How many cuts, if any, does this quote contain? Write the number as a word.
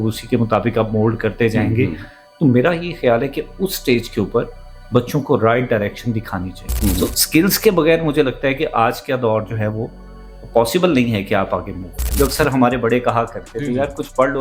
two